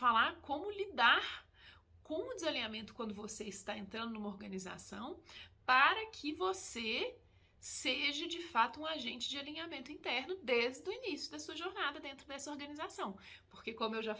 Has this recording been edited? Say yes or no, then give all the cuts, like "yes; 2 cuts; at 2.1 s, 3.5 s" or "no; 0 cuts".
no; 0 cuts